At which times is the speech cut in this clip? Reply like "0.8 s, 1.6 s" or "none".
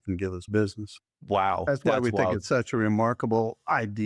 none